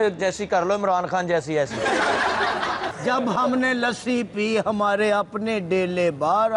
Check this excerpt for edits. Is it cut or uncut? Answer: cut